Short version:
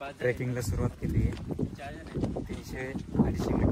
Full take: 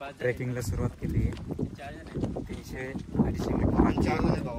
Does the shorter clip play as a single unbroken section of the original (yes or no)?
yes